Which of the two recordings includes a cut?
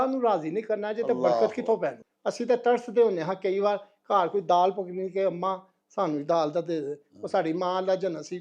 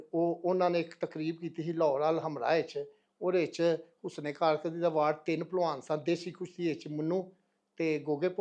first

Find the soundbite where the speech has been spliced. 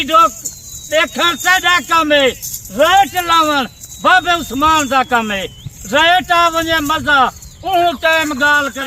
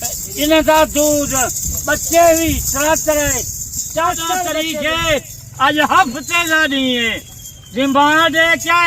second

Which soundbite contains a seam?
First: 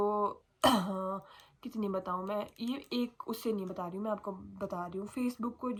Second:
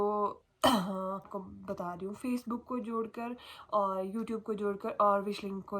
second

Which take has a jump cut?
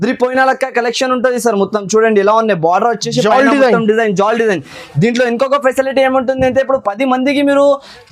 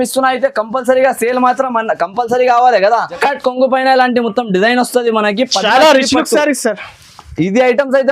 second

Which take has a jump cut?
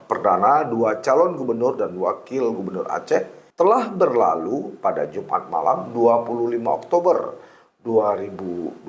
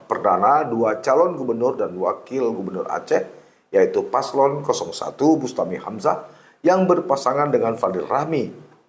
first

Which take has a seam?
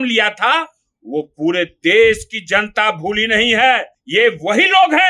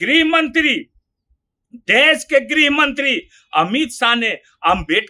first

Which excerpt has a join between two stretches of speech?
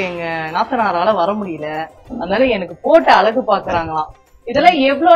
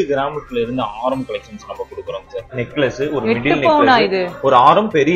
second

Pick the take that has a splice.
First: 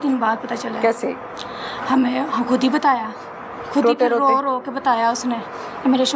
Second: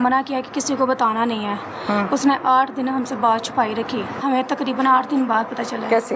second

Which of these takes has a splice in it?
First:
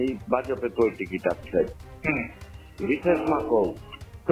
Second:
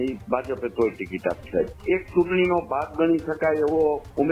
second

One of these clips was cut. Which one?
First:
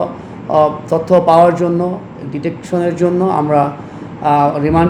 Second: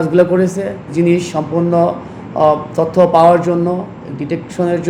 second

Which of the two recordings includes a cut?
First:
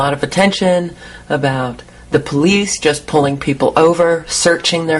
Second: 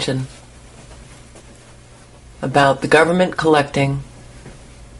first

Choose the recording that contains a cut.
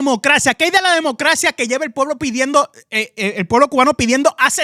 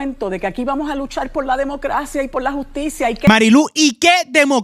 second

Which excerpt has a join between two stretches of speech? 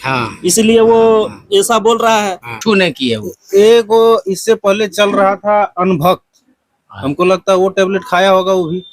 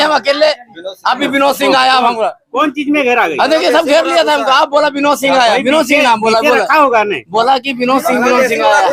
first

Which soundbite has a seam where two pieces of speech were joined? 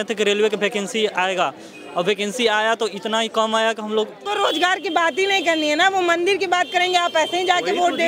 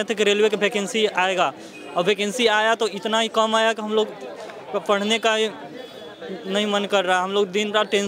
first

